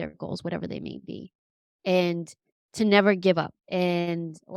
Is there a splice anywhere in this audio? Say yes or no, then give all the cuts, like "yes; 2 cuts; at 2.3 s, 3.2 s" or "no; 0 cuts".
yes; 1 cut; at 3.5 s